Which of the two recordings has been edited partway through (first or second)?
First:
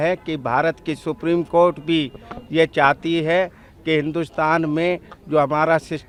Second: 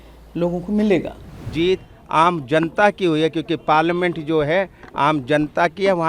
second